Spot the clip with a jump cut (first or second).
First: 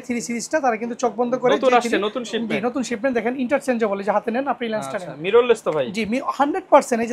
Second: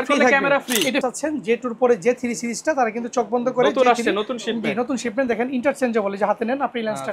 second